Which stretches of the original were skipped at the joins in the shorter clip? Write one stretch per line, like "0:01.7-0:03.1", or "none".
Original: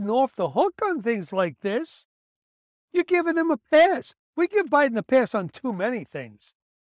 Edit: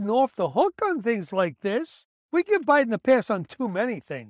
0:02.1-0:04.2